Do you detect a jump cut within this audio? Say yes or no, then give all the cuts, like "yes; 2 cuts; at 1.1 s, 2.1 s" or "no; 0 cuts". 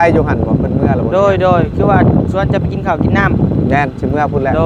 no; 0 cuts